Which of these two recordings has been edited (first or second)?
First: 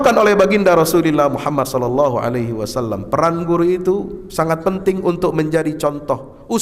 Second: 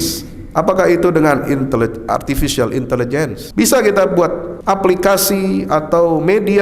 second